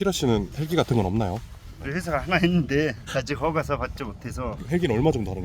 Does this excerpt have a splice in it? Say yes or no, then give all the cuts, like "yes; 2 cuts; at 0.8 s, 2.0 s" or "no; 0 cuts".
yes; 2 cuts; at 1.8 s, 4.5 s